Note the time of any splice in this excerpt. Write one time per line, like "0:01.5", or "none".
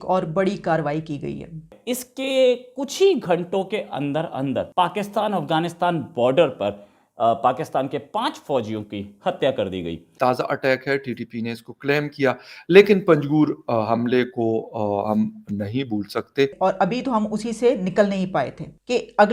0:01.7
0:10.0
0:16.5